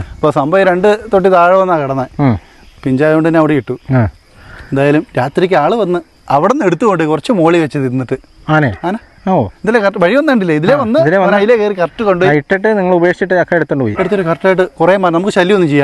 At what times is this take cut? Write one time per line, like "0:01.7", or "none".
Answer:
none